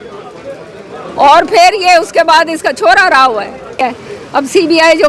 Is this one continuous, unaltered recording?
no; 1 cut; at 3.9 s

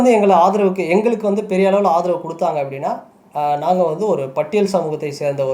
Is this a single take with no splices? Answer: yes; 0 cuts

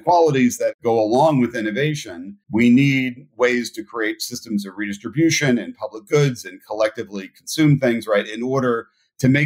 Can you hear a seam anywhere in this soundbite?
no; 0 cuts

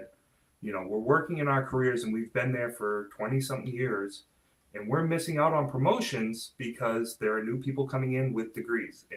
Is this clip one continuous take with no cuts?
yes; 0 cuts

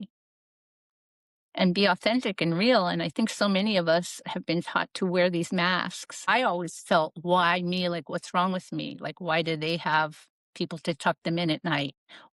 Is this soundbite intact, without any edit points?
no; 1 cut; at 6.3 s

